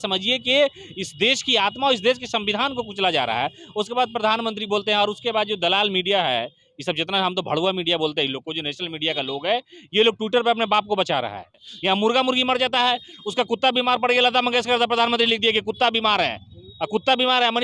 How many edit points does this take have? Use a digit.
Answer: 1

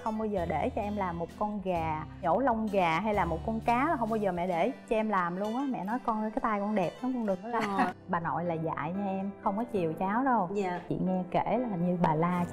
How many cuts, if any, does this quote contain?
2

